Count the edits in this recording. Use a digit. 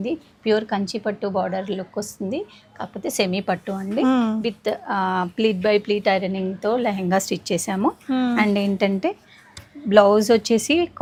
0